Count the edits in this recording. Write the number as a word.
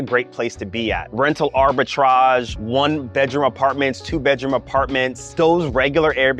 three